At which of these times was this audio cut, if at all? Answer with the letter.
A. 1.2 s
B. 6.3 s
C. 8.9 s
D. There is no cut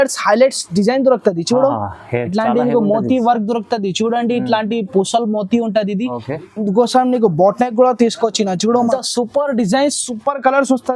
C